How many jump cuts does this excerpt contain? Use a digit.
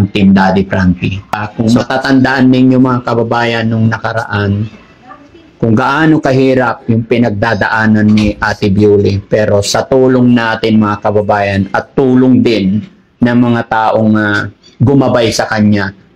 1